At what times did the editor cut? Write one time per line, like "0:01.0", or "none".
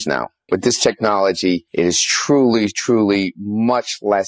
none